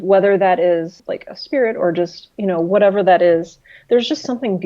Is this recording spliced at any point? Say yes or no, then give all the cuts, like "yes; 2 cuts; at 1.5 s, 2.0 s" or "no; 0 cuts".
yes; 1 cut; at 1.0 s